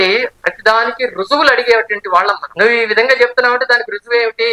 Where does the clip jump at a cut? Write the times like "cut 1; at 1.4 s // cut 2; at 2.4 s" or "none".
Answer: cut 1; at 2.4 s